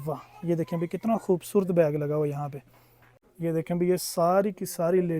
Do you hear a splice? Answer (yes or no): yes